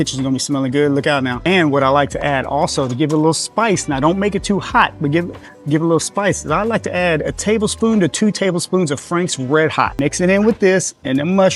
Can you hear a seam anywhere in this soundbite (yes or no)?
no